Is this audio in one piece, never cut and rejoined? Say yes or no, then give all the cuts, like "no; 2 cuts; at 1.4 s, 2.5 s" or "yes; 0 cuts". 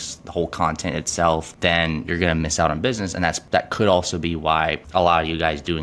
no; 3 cuts; at 1.5 s, 3.4 s, 4.8 s